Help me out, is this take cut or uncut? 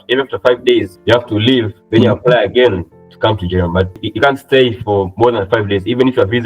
cut